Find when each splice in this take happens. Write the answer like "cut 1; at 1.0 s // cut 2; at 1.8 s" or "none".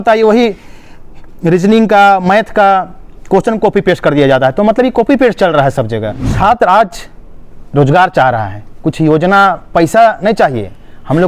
cut 1; at 6.3 s